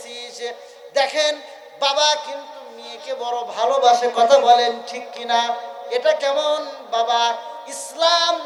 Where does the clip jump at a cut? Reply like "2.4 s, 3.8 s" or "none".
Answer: none